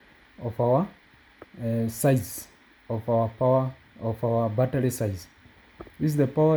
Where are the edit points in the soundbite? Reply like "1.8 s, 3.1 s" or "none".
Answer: none